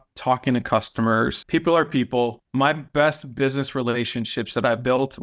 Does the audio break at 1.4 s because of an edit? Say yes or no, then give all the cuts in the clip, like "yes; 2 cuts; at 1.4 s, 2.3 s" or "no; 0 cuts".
yes; 2 cuts; at 1.4 s, 2.4 s